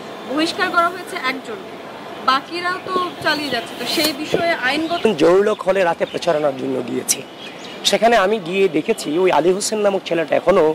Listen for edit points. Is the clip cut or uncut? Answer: uncut